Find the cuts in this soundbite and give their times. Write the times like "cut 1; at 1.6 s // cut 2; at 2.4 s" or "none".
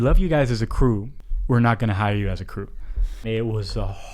cut 1; at 1.1 s // cut 2; at 3.2 s

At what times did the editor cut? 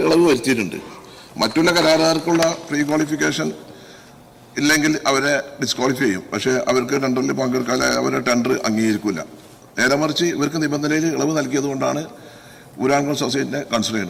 none

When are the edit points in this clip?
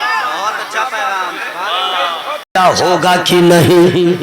cut 1; at 2.4 s

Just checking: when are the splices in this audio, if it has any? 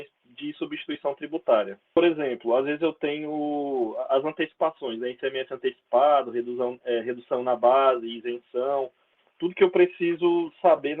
cut 1; at 2.0 s

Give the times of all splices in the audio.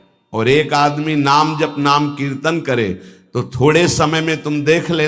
none

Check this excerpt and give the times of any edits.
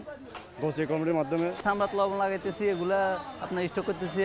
cut 1; at 1.6 s

